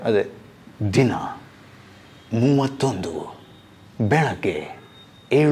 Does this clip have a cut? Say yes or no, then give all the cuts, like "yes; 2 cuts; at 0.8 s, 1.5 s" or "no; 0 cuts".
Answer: no; 0 cuts